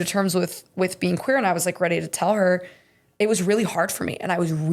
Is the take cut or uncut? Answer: uncut